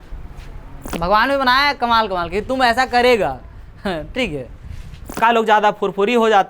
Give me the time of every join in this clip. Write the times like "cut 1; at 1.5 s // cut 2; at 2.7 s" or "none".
cut 1; at 1.0 s // cut 2; at 5.2 s